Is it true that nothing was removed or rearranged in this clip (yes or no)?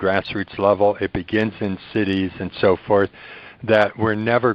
yes